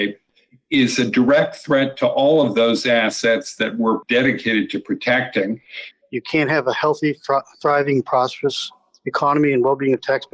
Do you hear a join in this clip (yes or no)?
yes